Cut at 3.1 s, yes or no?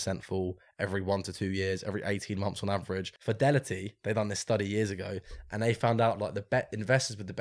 yes